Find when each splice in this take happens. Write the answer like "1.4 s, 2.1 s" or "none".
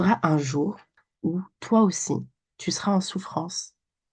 none